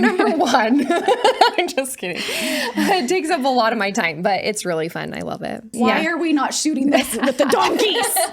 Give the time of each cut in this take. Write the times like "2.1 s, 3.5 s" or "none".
5.7 s